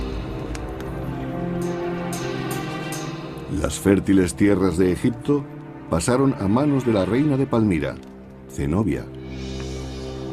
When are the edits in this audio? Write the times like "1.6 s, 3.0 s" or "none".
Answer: 4.4 s